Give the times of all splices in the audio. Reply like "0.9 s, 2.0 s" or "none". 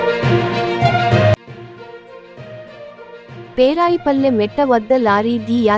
1.3 s